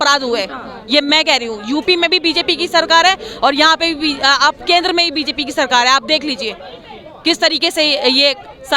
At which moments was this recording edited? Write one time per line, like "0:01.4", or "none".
none